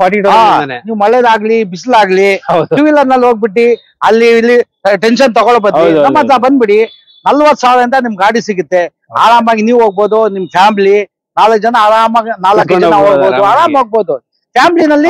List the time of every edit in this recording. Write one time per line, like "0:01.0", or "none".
none

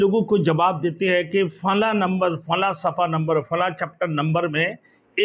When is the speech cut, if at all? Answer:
none

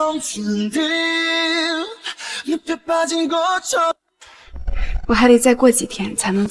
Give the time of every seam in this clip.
0:03.9

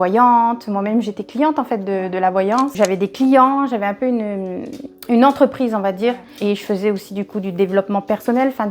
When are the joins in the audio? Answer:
0:02.7
0:06.3

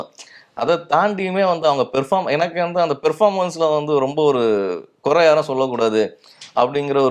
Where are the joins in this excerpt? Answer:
none

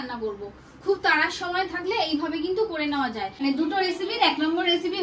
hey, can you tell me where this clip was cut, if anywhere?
0:03.3

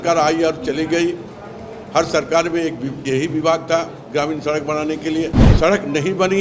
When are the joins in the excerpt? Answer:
0:05.4

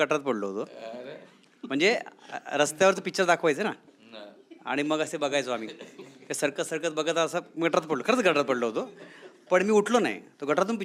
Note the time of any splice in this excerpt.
none

